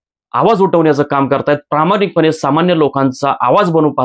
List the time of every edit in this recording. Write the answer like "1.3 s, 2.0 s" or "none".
none